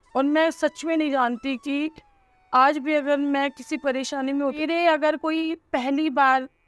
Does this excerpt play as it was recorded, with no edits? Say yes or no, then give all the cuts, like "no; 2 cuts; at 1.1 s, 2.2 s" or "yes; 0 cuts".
no; 1 cut; at 4.4 s